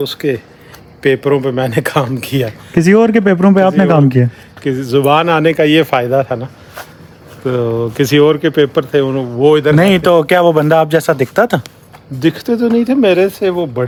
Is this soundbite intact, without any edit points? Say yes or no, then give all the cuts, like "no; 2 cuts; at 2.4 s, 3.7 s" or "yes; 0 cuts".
yes; 0 cuts